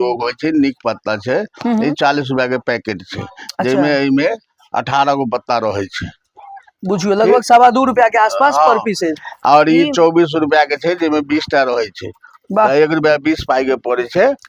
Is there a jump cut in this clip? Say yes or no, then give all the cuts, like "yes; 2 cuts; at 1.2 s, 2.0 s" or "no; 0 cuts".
no; 0 cuts